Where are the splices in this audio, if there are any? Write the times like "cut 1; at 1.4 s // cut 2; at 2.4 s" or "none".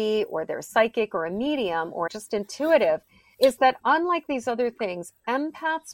cut 1; at 2.2 s